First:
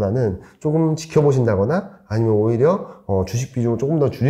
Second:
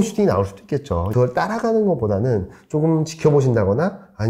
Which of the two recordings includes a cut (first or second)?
second